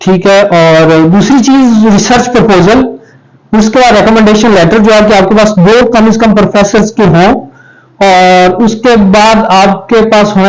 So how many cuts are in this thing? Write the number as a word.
zero